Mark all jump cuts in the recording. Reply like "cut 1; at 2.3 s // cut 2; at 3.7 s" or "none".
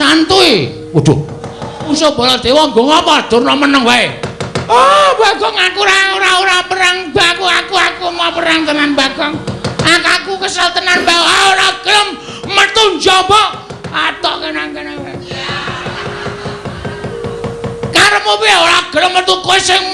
cut 1; at 1.9 s